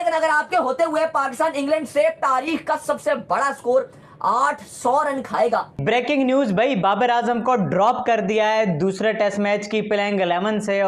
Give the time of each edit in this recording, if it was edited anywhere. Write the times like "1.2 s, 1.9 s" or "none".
5.8 s